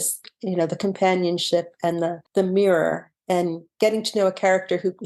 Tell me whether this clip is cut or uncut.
cut